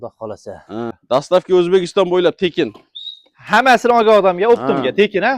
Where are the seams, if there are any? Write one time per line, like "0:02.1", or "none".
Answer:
0:01.0